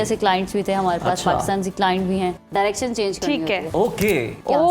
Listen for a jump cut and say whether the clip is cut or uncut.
cut